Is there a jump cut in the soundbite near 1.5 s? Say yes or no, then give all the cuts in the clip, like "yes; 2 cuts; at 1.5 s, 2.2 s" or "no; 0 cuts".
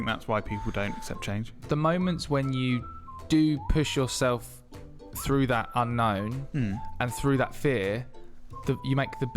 yes; 1 cut; at 1.5 s